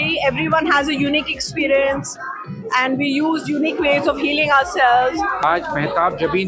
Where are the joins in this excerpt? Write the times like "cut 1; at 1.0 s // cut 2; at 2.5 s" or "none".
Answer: cut 1; at 5.4 s